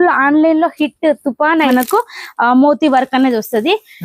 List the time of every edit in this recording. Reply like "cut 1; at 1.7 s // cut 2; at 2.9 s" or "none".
cut 1; at 1.7 s